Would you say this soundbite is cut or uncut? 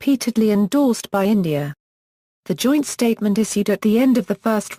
uncut